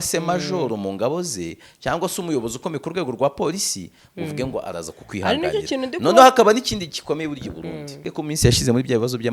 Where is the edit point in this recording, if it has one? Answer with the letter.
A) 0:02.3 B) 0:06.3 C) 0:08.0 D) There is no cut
C